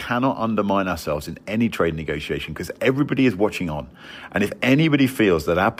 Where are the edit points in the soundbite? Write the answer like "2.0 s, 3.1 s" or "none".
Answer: none